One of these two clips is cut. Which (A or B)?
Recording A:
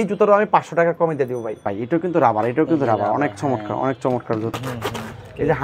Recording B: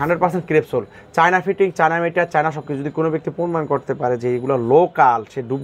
A